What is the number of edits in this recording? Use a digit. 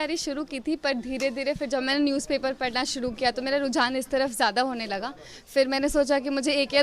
0